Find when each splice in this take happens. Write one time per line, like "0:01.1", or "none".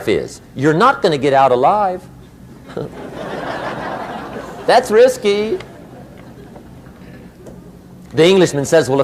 none